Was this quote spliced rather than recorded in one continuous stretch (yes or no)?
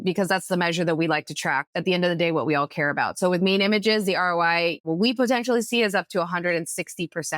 yes